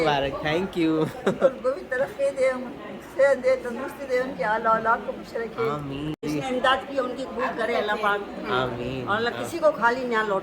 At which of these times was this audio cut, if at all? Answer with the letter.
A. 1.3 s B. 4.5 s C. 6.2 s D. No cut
C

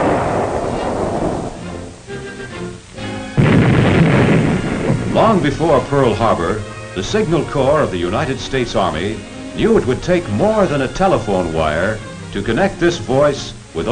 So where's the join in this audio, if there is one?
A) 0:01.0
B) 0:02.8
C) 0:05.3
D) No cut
C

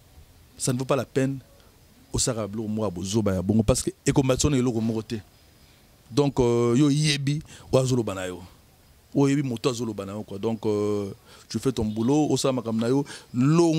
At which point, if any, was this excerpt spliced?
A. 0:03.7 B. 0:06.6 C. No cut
C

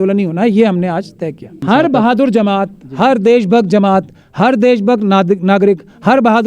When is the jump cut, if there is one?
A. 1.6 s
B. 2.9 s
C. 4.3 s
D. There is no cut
A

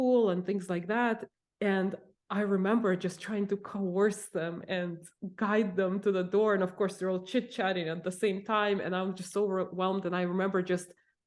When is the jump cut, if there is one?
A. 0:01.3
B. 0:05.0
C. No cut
A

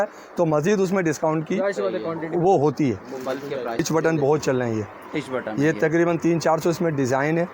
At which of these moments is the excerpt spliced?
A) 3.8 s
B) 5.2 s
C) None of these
A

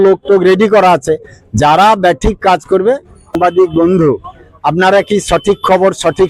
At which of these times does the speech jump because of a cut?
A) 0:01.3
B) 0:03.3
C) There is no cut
B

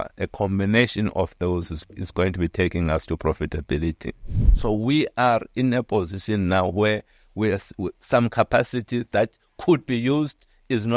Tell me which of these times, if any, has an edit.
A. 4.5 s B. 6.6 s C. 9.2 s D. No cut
A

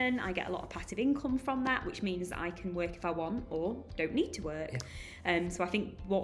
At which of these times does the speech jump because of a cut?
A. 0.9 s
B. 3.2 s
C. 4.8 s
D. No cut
D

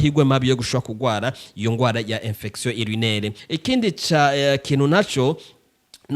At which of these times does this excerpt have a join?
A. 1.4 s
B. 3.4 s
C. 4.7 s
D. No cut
B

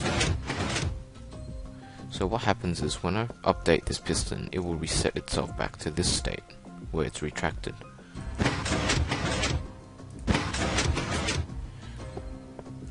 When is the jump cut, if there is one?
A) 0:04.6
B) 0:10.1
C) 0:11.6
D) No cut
D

